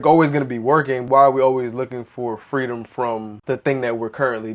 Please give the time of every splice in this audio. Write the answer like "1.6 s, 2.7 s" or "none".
1.0 s, 3.3 s